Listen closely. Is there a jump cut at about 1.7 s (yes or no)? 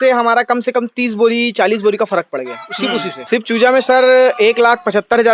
no